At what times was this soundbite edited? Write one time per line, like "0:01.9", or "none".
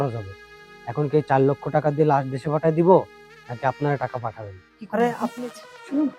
0:05.2